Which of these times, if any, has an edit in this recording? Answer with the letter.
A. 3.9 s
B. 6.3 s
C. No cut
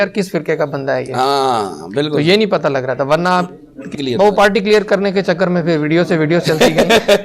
A